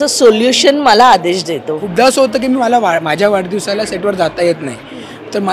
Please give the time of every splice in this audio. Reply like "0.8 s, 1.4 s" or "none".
1.8 s